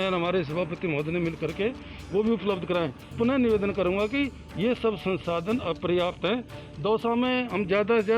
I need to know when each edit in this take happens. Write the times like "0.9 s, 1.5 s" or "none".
3.1 s